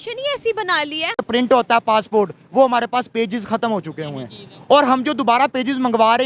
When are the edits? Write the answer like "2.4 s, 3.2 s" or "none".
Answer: 1.2 s